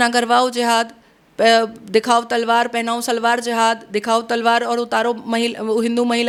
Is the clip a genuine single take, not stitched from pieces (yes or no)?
yes